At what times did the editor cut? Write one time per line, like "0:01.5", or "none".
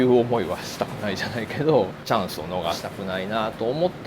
0:02.0
0:02.8